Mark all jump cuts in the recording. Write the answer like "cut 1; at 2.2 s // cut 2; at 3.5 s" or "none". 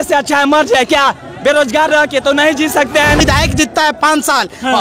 cut 1; at 3.2 s

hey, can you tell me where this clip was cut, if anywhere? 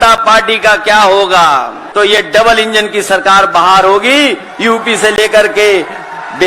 cut 1; at 1.8 s

